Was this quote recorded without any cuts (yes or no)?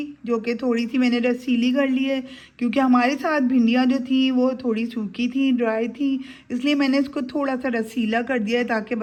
yes